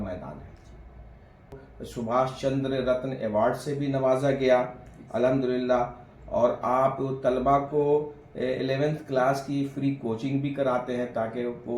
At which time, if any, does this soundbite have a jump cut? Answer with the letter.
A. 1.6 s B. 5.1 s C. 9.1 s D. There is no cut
A